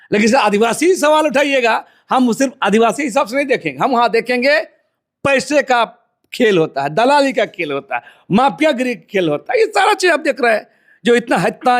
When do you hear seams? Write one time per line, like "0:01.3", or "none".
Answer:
none